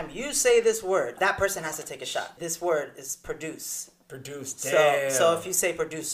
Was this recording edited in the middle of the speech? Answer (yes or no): yes